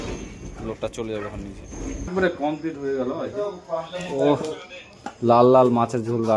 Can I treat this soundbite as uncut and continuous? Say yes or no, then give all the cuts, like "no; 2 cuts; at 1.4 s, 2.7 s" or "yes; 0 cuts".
no; 1 cut; at 2.1 s